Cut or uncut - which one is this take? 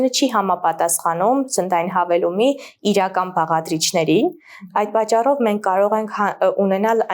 uncut